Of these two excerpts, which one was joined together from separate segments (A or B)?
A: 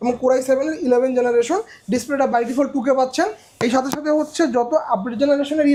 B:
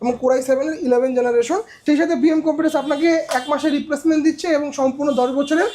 B